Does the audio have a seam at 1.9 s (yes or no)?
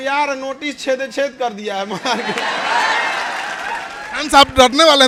no